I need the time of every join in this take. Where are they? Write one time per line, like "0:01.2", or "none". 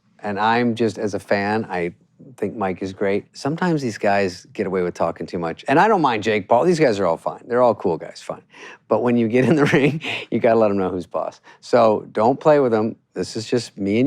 0:03.3
0:05.6